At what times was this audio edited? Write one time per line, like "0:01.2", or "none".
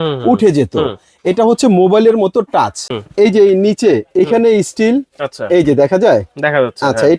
0:02.9